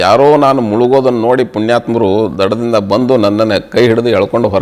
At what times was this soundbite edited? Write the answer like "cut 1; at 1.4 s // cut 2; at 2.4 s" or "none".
none